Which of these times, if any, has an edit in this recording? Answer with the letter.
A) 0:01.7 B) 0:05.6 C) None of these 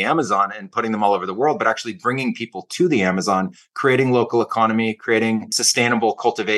B